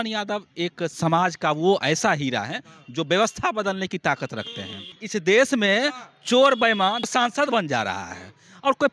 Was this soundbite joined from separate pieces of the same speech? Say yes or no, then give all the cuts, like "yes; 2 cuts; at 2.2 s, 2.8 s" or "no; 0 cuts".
yes; 3 cuts; at 1.0 s, 4.9 s, 7.0 s